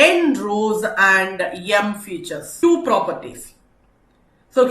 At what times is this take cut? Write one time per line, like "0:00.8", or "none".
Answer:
0:02.5